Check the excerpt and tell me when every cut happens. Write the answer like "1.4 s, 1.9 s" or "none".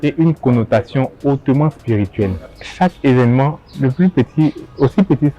2.5 s